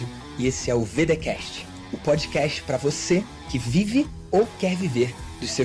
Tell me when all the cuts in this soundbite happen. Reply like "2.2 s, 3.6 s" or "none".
none